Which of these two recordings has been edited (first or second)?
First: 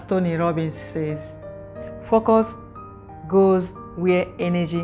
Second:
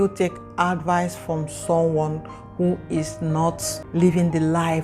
second